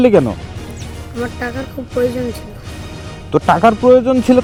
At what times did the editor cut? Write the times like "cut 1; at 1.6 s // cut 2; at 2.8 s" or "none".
none